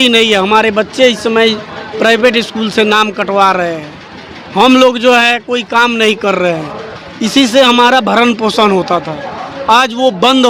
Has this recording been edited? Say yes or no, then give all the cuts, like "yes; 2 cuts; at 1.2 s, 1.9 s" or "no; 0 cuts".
no; 0 cuts